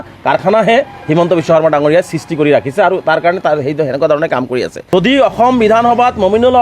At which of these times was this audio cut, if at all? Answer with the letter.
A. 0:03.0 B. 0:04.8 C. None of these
B